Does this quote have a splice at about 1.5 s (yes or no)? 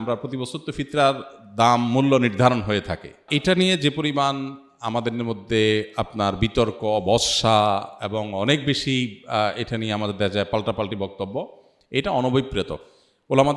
no